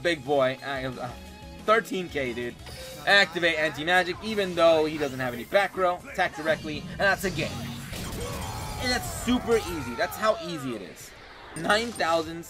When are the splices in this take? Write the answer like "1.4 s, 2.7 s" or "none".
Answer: 11.5 s